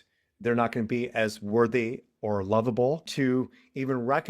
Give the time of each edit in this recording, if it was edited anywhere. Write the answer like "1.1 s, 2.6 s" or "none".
3.1 s